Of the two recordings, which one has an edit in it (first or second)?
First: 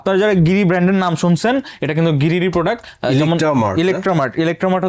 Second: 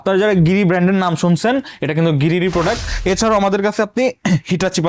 second